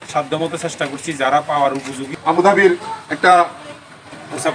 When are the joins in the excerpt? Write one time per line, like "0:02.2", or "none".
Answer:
0:02.1